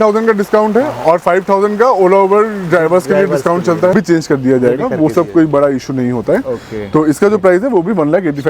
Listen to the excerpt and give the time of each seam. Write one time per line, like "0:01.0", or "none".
0:03.9